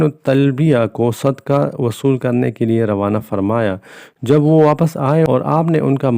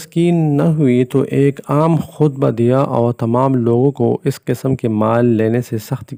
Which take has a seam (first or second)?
first